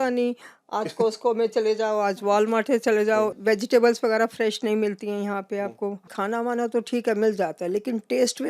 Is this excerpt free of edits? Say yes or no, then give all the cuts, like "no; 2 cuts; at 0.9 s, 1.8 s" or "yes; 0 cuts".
no; 2 cuts; at 3.3 s, 6.1 s